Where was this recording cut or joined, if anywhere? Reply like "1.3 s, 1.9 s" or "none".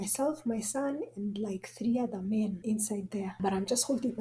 3.0 s